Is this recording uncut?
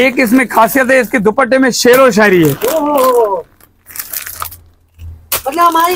yes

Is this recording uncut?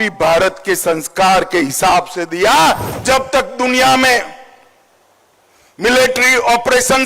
no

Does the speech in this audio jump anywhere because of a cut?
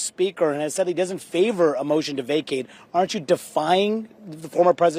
no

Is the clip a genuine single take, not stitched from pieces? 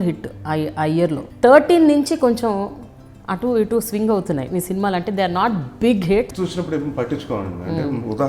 no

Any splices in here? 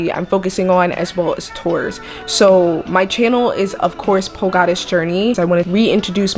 yes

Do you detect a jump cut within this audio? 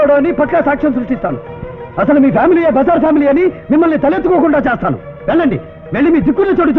no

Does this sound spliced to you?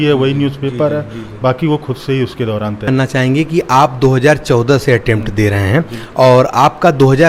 yes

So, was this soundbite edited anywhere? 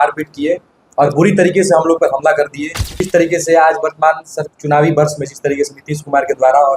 yes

